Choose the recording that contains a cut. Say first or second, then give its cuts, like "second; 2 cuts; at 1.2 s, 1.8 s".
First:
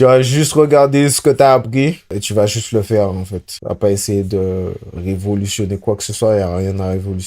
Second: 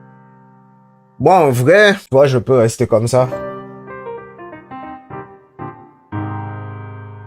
second; 1 cut; at 2.0 s